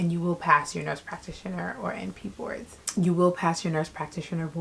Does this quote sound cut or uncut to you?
uncut